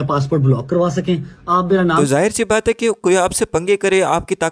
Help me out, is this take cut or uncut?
uncut